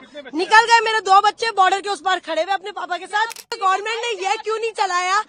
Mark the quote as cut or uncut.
cut